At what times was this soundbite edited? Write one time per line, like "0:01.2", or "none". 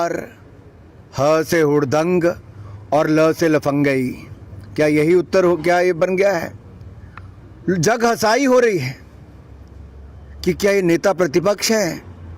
none